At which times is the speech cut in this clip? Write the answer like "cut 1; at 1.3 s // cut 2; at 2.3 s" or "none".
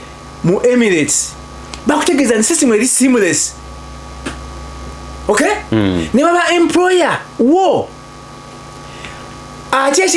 none